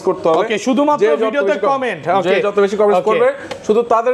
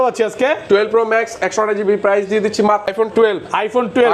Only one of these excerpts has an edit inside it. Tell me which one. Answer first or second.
second